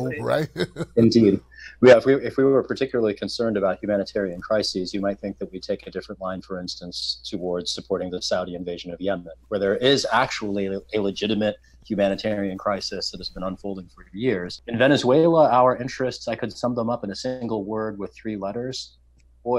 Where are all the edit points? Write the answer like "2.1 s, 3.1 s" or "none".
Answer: 14.6 s

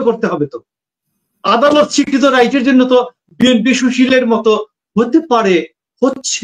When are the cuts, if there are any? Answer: none

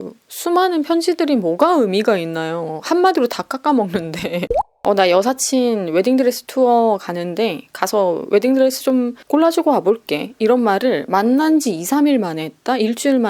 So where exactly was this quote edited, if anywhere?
4.8 s

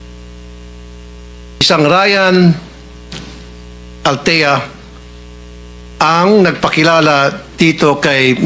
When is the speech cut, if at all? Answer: 1.7 s

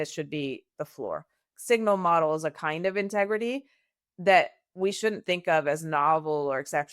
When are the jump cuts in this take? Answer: 1.5 s

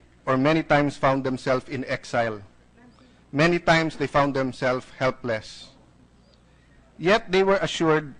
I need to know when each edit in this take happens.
none

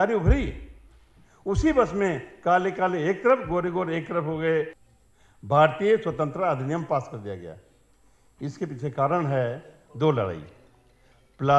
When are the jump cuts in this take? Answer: 4.8 s

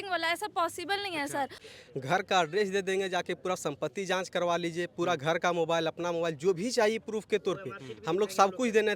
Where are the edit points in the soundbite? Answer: 1.6 s

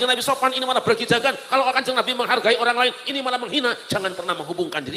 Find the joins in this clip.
none

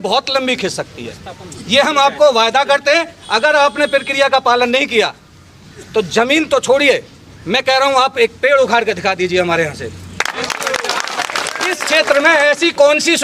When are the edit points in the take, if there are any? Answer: 11.8 s

